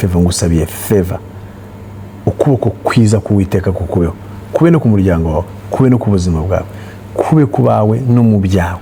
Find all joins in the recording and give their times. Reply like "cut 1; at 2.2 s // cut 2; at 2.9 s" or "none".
none